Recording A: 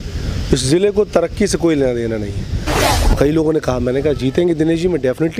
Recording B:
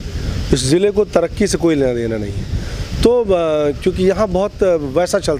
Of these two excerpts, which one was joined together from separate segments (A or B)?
A